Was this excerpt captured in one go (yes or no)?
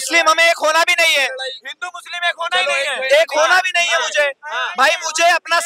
yes